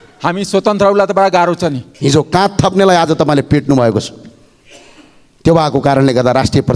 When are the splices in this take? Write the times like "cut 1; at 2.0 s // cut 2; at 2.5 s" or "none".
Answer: cut 1; at 1.9 s

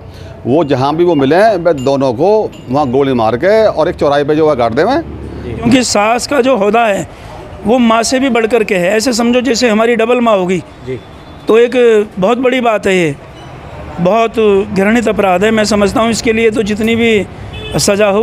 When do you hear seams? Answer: cut 1; at 5.7 s

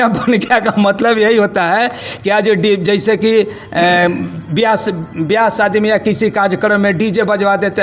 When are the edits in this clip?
none

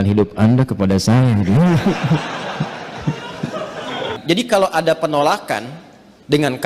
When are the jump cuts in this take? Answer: cut 1; at 4.2 s

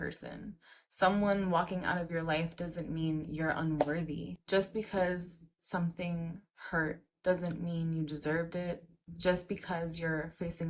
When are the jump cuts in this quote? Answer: none

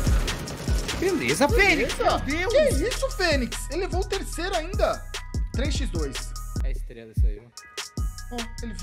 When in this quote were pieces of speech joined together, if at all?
none

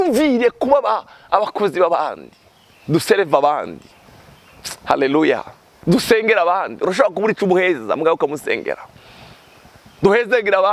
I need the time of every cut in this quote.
none

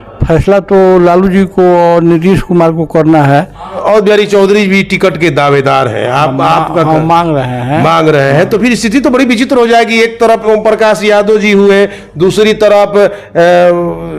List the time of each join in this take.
cut 1; at 3.8 s

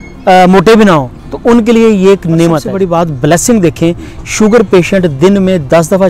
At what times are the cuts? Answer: cut 1; at 2.7 s

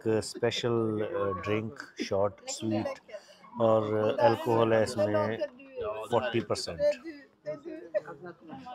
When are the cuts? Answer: none

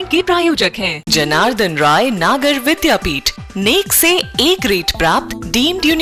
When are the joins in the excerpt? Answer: none

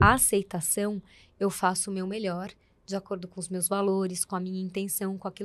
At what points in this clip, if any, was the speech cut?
none

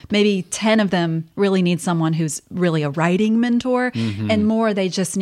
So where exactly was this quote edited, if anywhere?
none

